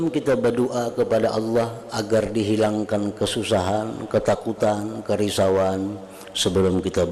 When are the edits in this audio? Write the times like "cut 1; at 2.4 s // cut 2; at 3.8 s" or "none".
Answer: none